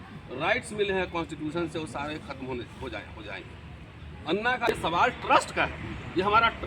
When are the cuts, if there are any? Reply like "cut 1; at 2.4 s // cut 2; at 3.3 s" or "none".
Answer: cut 1; at 4.7 s

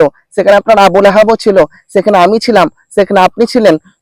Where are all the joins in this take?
none

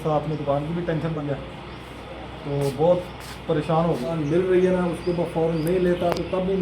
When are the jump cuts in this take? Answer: cut 1; at 1.2 s // cut 2; at 4.1 s

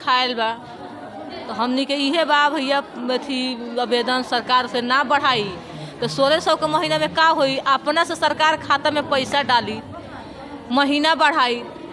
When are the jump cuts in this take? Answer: none

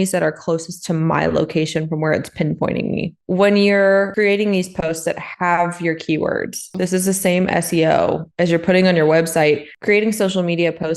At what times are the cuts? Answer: cut 1; at 3.2 s // cut 2; at 4.1 s // cut 3; at 6.7 s

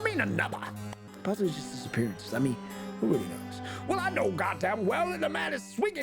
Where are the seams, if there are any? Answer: cut 1; at 1.0 s

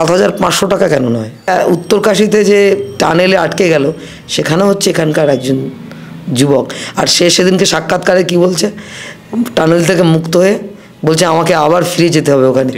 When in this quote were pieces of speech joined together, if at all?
cut 1; at 1.5 s

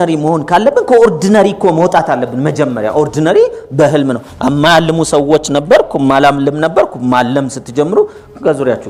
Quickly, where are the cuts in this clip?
none

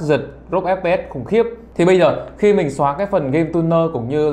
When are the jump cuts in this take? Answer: cut 1; at 1.6 s

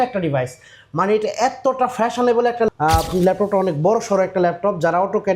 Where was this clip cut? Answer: cut 1; at 2.7 s

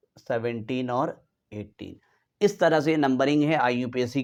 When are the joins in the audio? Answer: none

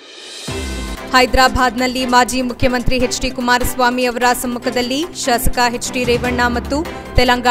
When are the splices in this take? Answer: cut 1; at 0.9 s

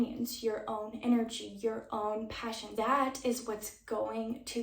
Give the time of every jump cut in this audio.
cut 1; at 2.7 s

